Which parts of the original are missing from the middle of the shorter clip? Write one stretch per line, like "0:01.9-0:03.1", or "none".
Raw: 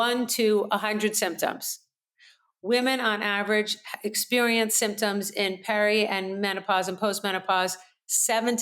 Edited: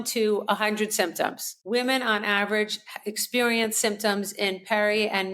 0:01.7-0:02.5